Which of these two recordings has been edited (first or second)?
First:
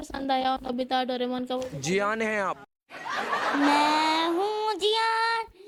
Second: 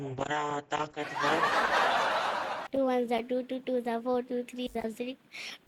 second